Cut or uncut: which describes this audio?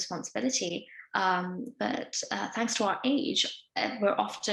uncut